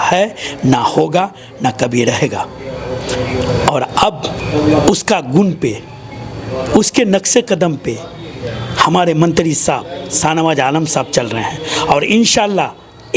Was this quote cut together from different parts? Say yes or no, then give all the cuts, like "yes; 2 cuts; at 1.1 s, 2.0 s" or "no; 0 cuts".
no; 0 cuts